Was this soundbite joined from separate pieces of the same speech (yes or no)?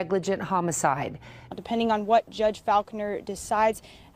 yes